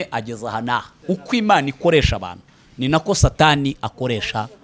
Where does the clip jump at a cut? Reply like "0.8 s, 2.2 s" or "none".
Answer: 0.9 s